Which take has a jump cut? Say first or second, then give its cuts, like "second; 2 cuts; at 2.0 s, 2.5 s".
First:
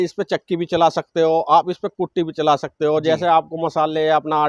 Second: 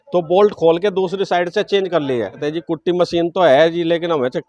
second; 1 cut; at 2.4 s